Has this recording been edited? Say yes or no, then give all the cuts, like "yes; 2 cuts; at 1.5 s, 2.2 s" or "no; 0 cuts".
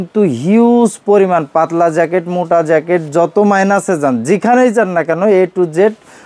no; 0 cuts